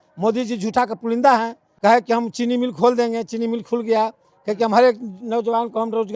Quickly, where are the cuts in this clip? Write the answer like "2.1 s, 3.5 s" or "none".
1.6 s